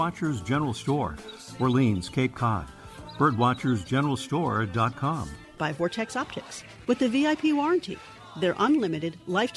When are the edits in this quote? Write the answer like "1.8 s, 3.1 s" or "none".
5.6 s